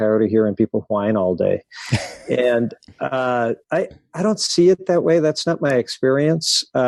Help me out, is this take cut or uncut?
uncut